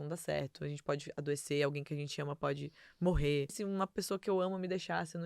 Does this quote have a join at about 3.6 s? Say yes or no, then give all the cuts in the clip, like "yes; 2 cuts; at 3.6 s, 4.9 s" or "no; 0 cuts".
yes; 1 cut; at 3.6 s